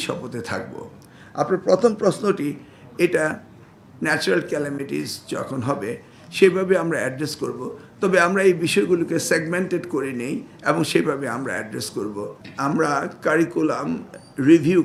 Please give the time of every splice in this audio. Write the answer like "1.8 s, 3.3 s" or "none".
none